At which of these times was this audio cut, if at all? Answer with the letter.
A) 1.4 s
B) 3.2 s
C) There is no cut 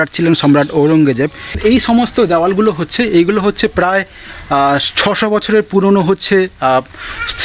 A